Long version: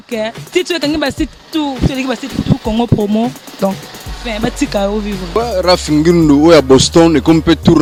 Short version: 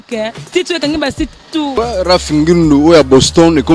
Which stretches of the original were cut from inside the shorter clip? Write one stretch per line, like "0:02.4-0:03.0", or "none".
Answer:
0:01.7-0:05.3